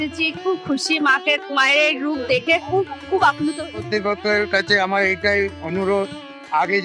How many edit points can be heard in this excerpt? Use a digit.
1